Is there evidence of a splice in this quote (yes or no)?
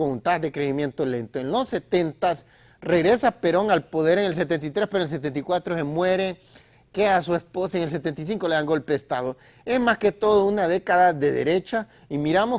yes